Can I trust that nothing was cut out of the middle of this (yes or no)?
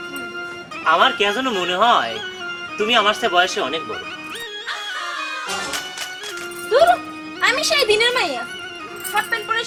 yes